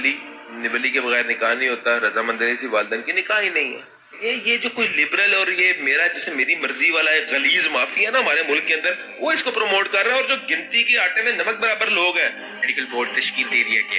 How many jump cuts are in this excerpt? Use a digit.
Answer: 2